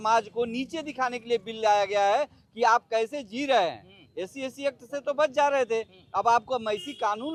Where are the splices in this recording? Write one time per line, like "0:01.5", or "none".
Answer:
none